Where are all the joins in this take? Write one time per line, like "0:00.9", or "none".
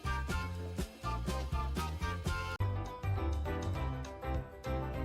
0:02.7

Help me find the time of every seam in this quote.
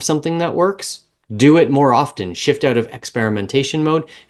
none

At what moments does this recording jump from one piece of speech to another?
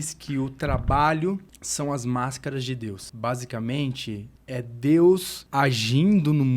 0:01.6
0:03.1
0:04.3
0:05.4

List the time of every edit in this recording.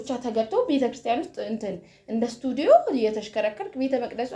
none

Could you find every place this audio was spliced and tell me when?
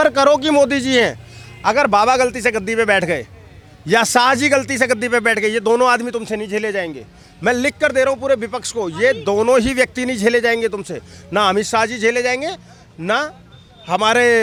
none

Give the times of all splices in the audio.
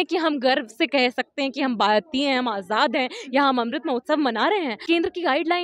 0:04.7

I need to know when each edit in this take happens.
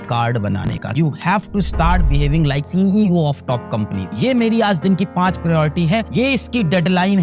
0:00.9

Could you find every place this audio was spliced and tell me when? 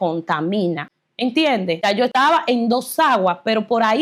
0:00.9
0:02.1

